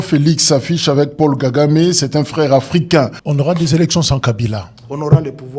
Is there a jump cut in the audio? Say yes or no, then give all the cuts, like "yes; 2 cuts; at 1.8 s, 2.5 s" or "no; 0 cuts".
yes; 1 cut; at 3.2 s